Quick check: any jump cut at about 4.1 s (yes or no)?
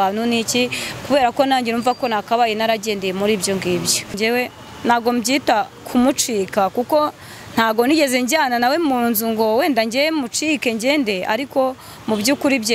yes